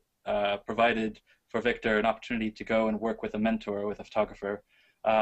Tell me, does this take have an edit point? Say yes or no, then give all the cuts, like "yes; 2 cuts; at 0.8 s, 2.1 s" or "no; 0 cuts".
yes; 1 cut; at 2.6 s